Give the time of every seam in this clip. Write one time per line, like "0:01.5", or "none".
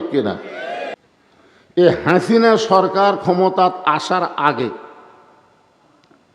0:01.0